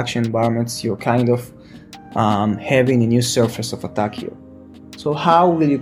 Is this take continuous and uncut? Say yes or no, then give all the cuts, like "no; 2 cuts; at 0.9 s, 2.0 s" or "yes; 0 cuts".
yes; 0 cuts